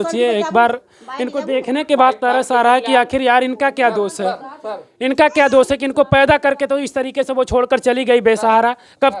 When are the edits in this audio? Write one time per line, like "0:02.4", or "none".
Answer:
none